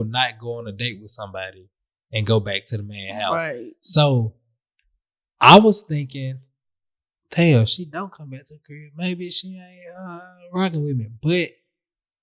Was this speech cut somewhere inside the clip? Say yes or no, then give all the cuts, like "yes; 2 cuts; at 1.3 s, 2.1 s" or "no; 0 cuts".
no; 0 cuts